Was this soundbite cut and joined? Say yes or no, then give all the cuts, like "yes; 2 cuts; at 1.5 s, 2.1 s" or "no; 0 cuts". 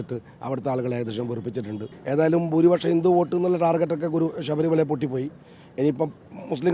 yes; 1 cut; at 1.9 s